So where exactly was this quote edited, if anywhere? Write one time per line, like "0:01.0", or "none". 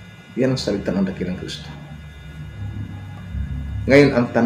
0:03.2